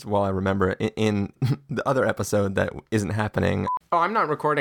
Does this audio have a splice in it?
yes; 2 cuts; at 1.3 s, 3.9 s

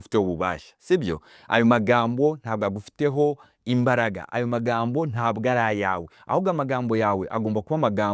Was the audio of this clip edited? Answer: no; 0 cuts

